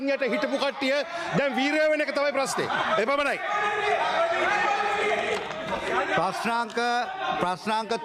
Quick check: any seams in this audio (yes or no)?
no